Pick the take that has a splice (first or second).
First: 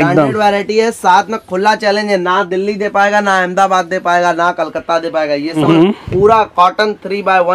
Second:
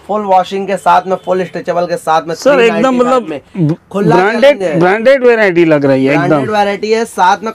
first